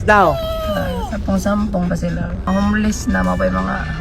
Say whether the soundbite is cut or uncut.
cut